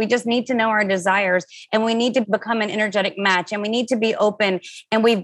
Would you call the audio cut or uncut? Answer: cut